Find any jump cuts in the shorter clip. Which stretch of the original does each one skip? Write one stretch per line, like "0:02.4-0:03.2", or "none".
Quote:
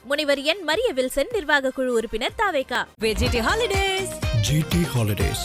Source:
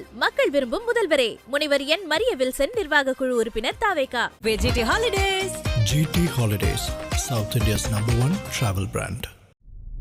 none